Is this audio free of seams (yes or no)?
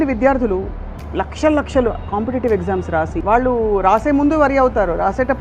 no